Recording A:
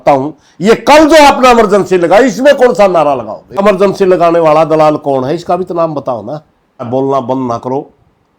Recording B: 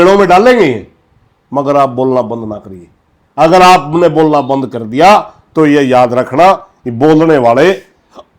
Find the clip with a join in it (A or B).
A